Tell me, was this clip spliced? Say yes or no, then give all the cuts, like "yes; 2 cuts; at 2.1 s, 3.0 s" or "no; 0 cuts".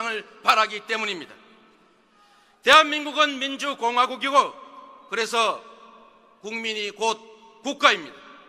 yes; 1 cut; at 7.5 s